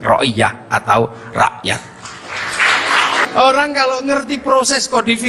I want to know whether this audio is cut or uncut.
cut